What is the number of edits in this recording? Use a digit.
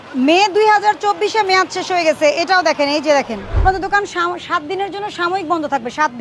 1